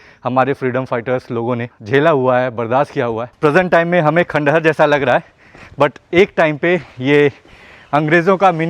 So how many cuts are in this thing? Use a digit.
2